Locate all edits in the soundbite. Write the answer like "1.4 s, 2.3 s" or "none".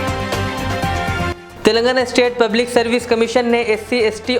none